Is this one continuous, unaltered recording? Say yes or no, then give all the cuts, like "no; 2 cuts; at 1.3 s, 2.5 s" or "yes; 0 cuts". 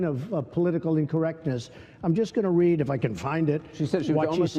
yes; 0 cuts